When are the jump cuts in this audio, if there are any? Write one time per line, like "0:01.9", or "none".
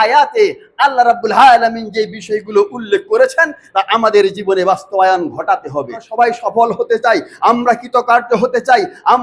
0:06.1